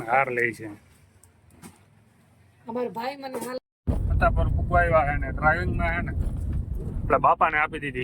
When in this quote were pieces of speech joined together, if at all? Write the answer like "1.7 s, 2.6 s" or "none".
3.6 s